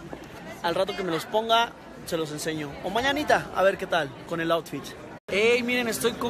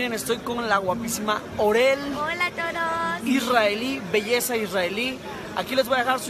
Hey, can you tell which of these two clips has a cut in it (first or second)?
second